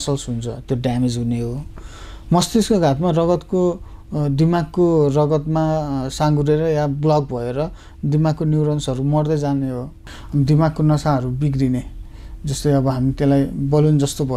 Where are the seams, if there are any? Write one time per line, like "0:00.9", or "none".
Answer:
0:10.2